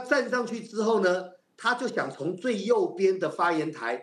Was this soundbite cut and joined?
no; 0 cuts

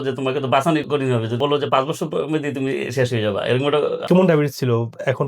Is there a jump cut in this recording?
yes; 2 cuts; at 1.4 s, 4.0 s

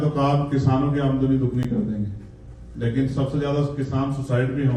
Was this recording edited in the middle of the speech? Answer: no; 0 cuts

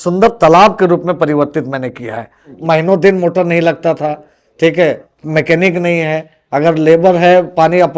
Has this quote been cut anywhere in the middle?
yes; 1 cut; at 2.5 s

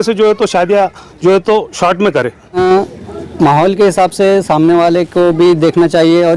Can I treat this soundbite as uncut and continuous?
no; 1 cut; at 2.6 s

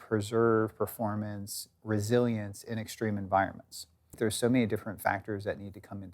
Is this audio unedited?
no; 1 cut; at 4.1 s

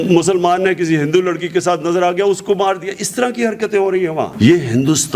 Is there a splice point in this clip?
no; 0 cuts

